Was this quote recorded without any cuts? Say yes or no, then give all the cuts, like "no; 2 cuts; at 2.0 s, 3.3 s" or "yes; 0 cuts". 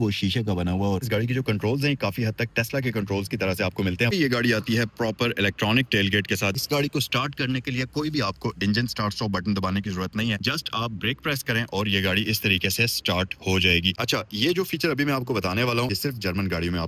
no; 6 cuts; at 1.0 s, 4.1 s, 6.6 s, 10.4 s, 14.0 s, 15.9 s